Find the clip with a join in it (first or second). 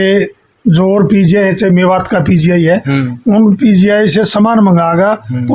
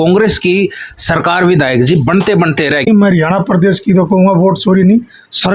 second